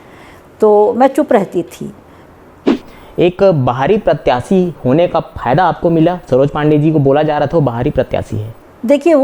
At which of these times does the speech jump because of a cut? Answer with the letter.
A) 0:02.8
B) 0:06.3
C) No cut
A